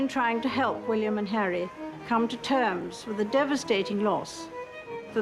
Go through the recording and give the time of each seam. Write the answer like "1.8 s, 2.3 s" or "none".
none